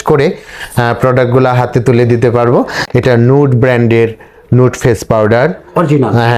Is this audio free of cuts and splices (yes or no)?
no